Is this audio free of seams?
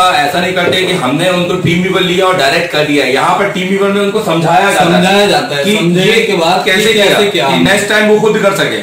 yes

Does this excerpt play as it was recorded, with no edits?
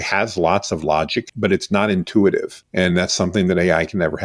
no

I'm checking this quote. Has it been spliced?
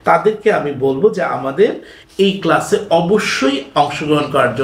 no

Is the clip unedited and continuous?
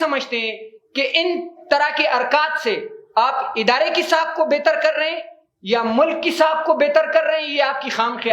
yes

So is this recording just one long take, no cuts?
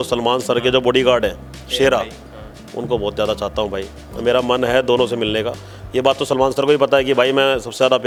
yes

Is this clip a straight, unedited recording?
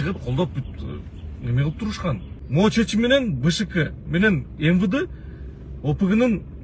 no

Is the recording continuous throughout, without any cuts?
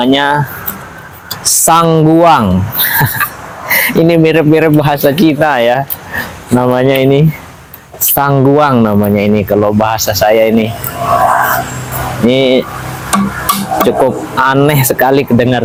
yes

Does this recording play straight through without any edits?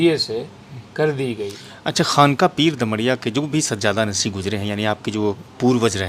no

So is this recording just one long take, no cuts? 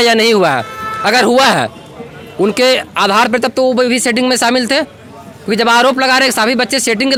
yes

